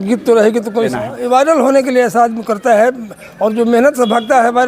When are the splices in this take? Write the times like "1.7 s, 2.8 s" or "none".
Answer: 0.9 s